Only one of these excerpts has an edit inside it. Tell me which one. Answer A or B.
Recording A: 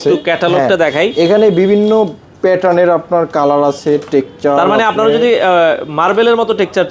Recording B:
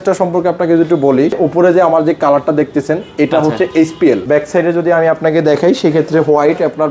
B